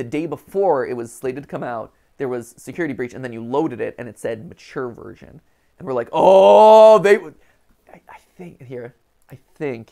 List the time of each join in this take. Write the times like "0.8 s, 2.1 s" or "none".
none